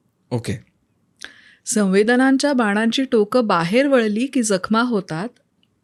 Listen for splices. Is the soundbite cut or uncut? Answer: uncut